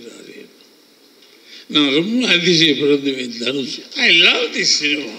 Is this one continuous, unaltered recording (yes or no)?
no